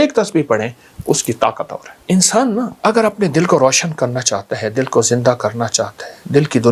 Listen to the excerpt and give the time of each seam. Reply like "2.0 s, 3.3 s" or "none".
1.9 s, 2.7 s